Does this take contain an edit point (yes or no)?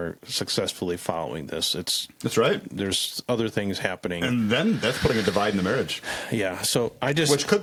no